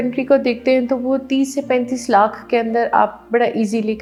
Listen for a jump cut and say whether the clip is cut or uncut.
uncut